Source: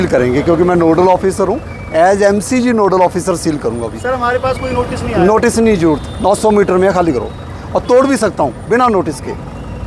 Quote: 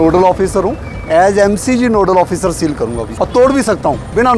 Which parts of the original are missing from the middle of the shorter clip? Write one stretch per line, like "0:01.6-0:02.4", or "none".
0:03.9-0:07.6